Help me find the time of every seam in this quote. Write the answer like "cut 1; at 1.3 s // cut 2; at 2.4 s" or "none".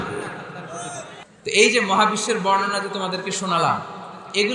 cut 1; at 1.2 s